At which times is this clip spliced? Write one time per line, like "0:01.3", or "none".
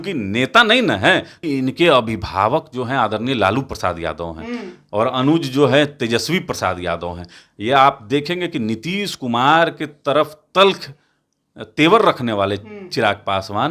0:01.3